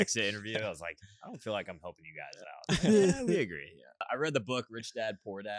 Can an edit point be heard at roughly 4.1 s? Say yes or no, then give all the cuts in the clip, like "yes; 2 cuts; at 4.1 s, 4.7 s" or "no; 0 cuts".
yes; 1 cut; at 4.1 s